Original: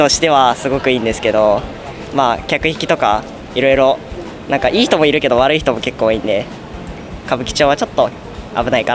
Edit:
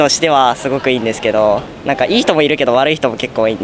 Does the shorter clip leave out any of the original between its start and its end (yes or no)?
yes